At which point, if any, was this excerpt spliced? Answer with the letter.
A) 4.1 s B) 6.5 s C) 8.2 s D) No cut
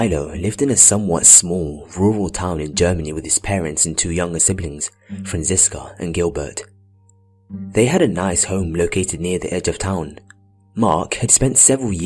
A